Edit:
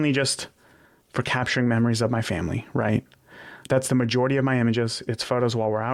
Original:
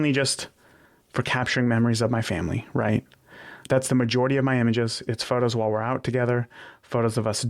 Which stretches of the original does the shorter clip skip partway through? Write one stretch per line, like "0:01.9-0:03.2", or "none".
none